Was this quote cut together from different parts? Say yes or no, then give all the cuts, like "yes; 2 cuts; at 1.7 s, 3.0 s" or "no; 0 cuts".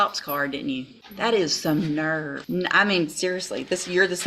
yes; 2 cuts; at 1.0 s, 2.4 s